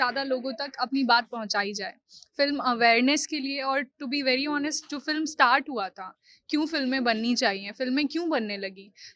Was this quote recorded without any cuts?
yes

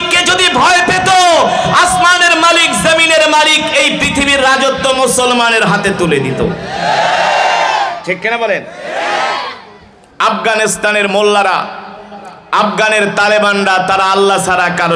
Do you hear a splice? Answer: no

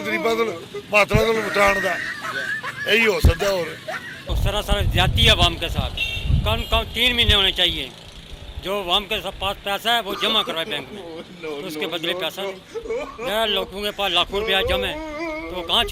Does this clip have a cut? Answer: no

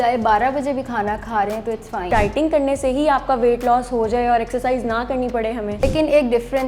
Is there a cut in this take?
yes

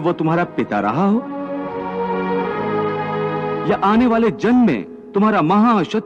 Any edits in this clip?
no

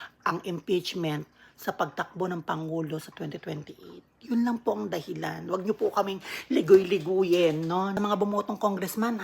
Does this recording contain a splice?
yes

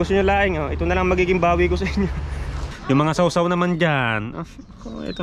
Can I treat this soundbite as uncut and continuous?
no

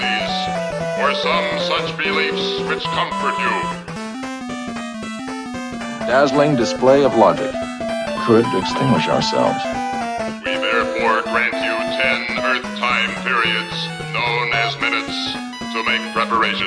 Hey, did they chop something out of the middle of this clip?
no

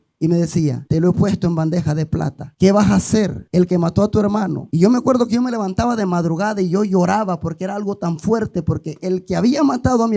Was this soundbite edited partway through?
yes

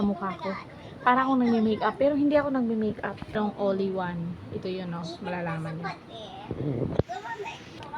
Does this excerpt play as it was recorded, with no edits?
no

